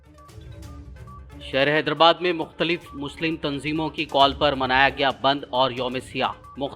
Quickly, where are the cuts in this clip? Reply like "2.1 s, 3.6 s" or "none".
1.0 s